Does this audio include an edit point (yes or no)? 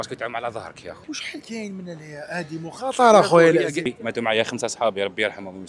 yes